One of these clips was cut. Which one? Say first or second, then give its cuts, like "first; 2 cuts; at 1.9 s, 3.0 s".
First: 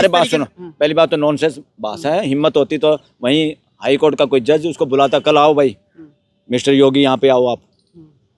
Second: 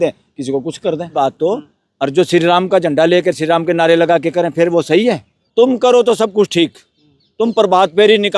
second; 2 cuts; at 1.2 s, 5.3 s